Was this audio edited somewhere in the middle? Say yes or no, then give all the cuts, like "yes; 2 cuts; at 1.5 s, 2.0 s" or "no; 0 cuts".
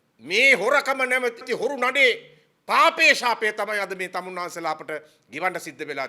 yes; 1 cut; at 1.5 s